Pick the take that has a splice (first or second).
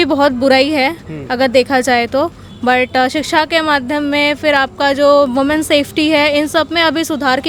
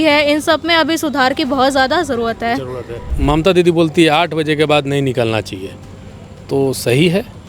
second